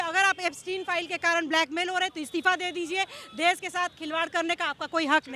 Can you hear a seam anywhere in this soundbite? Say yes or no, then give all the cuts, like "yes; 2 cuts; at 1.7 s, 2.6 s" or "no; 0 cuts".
no; 0 cuts